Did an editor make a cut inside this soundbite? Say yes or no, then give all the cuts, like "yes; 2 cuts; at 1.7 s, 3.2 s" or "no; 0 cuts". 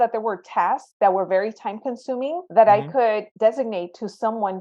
yes; 2 cuts; at 2.4 s, 3.3 s